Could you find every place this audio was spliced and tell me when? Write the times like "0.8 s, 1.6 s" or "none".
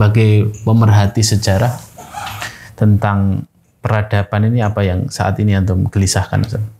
none